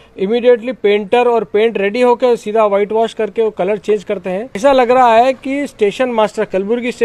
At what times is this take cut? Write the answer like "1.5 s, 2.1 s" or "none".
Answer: 4.6 s